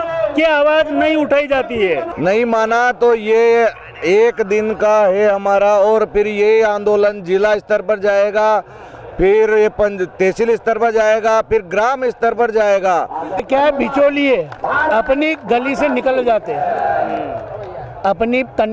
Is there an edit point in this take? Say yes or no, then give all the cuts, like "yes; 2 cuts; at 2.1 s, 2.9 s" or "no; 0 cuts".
yes; 2 cuts; at 2.1 s, 13.4 s